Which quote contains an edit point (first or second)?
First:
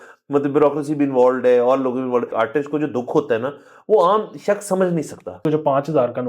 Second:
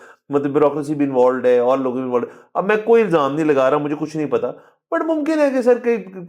first